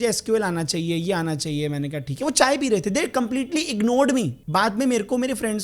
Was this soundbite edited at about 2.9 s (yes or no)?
no